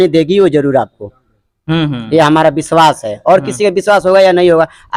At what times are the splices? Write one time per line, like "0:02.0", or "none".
none